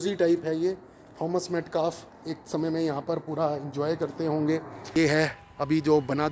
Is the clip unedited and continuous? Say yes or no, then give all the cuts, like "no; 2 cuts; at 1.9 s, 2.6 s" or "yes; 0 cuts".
no; 1 cut; at 4.9 s